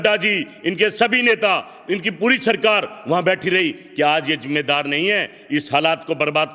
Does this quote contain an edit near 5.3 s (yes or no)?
no